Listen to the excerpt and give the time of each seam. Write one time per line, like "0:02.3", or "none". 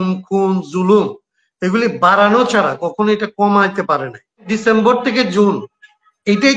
0:04.4